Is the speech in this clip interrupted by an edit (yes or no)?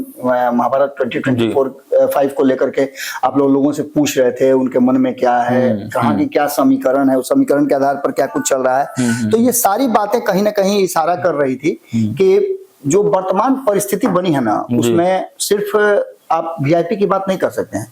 no